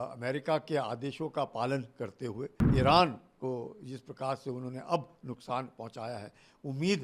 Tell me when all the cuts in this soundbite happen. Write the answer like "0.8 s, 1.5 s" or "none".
2.6 s